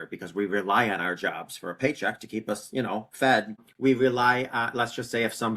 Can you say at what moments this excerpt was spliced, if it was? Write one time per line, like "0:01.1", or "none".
0:03.7